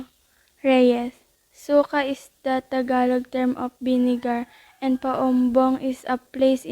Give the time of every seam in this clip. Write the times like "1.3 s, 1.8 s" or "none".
4.7 s